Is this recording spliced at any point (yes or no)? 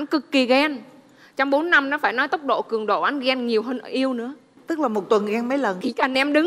no